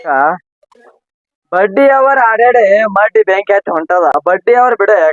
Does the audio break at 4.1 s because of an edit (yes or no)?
yes